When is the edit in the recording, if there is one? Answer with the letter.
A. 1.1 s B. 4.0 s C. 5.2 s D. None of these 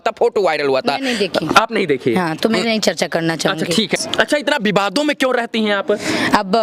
B